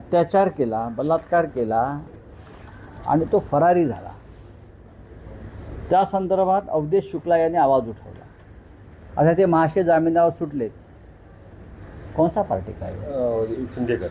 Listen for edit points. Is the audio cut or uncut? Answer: uncut